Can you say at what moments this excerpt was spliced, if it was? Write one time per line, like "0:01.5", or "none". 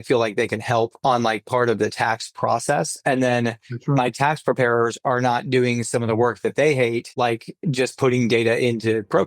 0:00.9
0:07.1